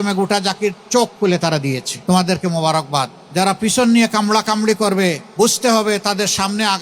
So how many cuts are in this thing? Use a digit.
3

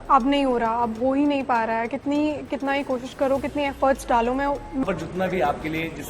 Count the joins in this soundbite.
1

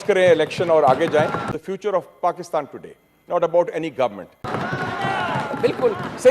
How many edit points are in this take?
2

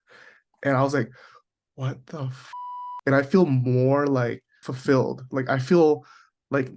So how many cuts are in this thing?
1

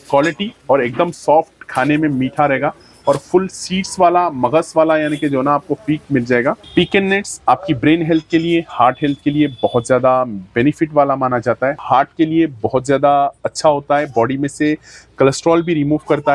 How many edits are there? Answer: 2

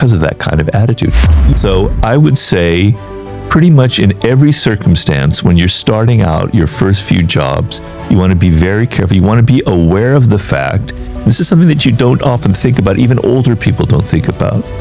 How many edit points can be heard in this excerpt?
1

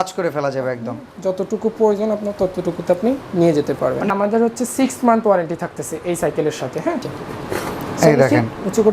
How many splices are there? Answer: 2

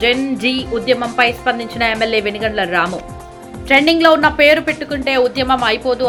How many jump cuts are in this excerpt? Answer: 0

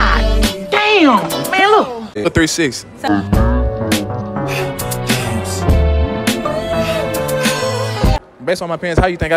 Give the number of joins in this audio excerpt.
2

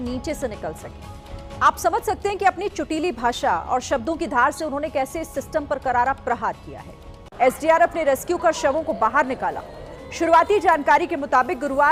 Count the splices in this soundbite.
0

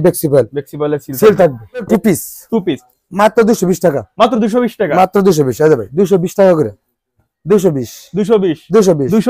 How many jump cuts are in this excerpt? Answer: 1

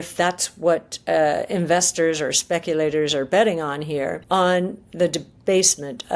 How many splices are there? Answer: 1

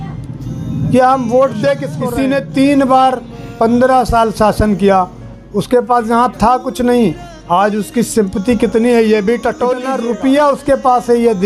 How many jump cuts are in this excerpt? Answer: 2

